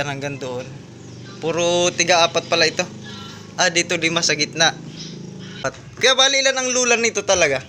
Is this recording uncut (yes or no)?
no